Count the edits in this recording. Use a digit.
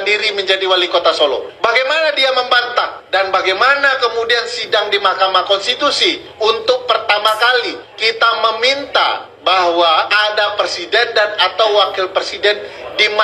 6